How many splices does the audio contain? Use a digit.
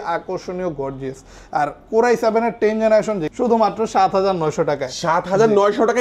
1